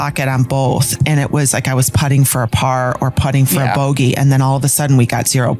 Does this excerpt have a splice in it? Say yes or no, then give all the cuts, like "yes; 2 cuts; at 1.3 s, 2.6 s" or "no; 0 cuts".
yes; 1 cut; at 1.0 s